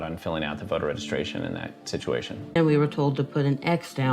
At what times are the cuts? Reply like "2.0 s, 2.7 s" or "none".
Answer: 2.6 s